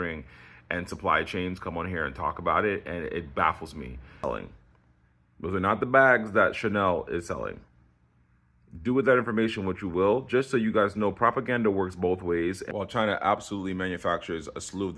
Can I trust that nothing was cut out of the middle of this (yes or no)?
no